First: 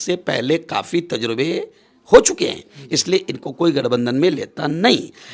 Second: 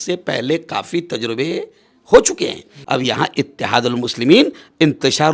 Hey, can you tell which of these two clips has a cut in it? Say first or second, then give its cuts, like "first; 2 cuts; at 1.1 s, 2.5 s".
second; 1 cut; at 2.8 s